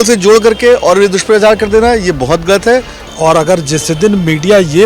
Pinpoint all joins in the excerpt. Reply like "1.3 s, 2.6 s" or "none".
3.0 s